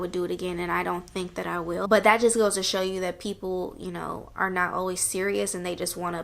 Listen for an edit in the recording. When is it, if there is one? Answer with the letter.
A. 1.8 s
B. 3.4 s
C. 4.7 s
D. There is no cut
A